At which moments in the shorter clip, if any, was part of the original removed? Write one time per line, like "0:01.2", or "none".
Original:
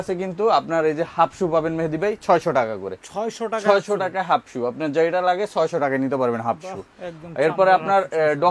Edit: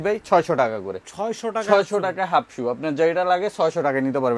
none